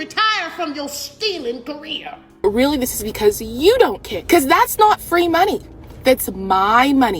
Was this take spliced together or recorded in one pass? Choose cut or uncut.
cut